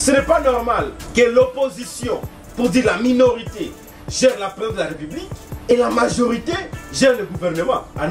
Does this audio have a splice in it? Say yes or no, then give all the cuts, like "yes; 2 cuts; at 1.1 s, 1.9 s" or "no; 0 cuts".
yes; 2 cuts; at 1.0 s, 5.7 s